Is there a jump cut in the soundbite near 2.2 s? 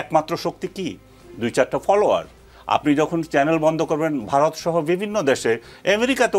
no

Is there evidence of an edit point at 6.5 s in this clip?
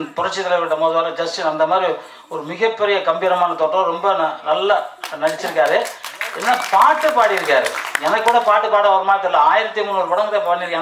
no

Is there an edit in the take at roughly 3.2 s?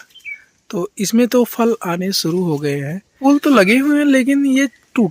yes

